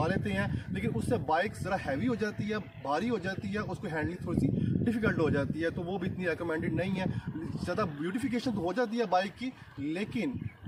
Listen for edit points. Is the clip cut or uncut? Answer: uncut